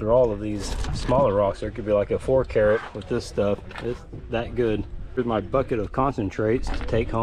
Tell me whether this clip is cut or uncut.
cut